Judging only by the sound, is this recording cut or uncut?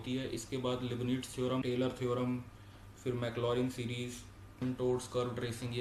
cut